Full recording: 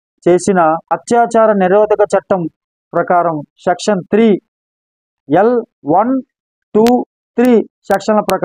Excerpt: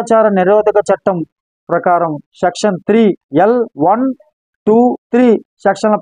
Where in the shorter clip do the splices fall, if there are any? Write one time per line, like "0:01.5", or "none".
0:03.6
0:05.0